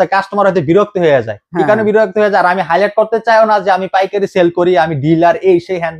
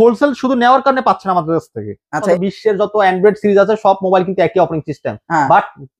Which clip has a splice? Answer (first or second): second